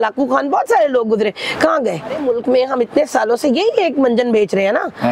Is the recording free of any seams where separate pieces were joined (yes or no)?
no